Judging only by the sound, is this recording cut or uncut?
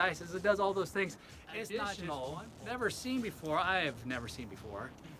cut